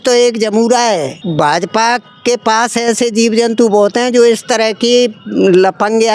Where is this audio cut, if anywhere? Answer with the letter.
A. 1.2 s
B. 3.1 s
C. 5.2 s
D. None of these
A